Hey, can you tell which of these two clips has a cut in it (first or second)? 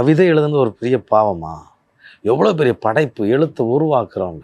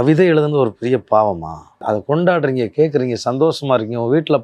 second